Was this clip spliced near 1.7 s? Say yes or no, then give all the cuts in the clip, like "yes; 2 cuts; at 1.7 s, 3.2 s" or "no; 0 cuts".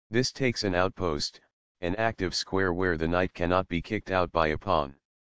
no; 1 cut; at 3.0 s